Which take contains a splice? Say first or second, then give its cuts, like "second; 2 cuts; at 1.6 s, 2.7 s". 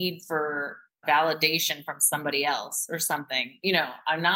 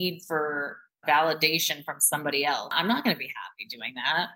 second; 1 cut; at 2.7 s